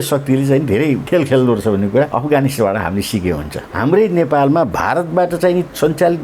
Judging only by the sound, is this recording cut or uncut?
cut